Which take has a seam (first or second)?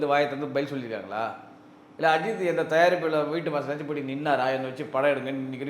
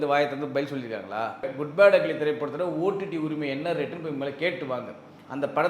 second